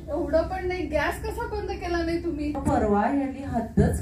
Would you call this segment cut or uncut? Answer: cut